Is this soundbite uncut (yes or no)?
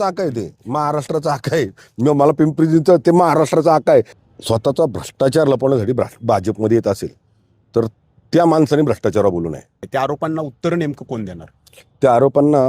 no